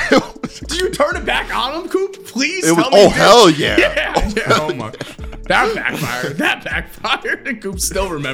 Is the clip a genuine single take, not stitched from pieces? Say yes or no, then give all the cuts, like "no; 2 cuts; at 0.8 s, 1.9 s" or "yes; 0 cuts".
yes; 0 cuts